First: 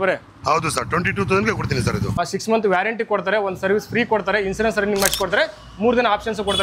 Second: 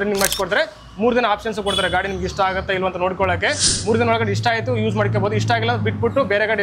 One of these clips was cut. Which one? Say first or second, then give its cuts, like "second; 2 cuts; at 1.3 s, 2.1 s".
first; 1 cut; at 2.2 s